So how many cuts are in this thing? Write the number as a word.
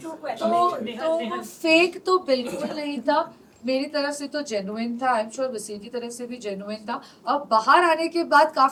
zero